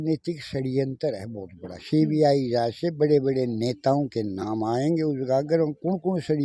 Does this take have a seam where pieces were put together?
no; 0 cuts

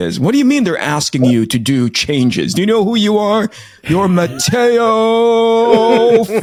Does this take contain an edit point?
no; 0 cuts

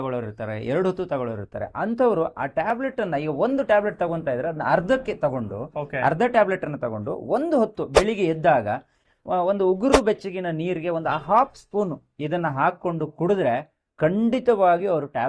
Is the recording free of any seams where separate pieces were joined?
yes; 0 cuts

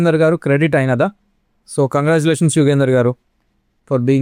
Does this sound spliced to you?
no; 0 cuts

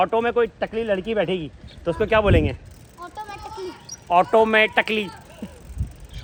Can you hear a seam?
no; 0 cuts

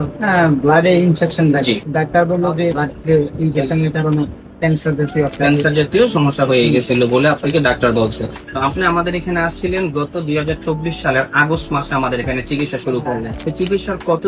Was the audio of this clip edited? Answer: yes; 4 cuts; at 1.8 s, 2.8 s, 8.4 s, 13.3 s

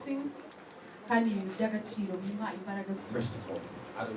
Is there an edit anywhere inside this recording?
yes; 1 cut; at 3.0 s

